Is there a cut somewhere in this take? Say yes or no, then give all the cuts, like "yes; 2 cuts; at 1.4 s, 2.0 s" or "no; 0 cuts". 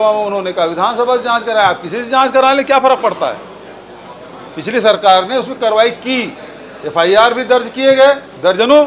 no; 0 cuts